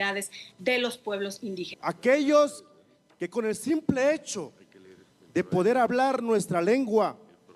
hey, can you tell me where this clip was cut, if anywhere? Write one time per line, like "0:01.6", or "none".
0:01.7